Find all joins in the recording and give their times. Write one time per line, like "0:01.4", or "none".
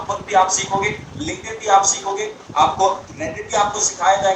none